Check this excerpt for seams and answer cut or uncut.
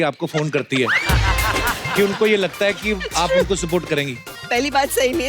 cut